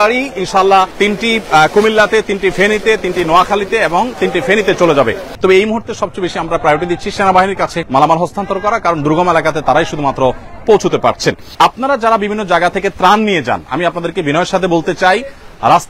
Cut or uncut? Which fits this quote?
cut